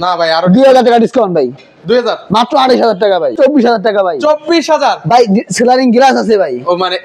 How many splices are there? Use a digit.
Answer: 1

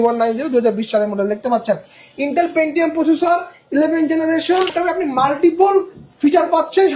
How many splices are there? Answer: 1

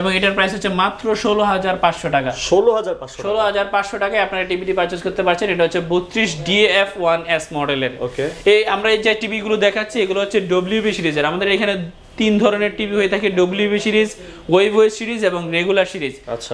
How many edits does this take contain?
0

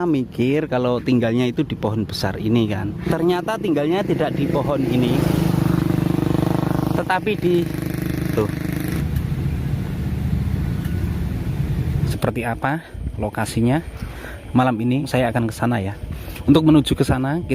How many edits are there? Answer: 4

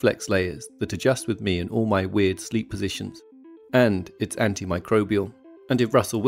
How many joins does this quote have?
1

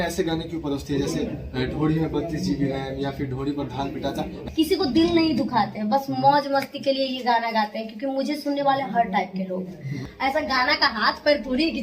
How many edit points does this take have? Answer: 2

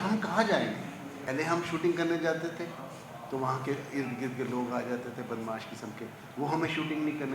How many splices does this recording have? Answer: 1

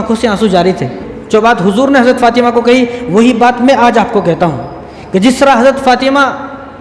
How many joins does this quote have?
1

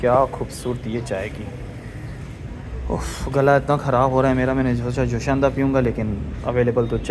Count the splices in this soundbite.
0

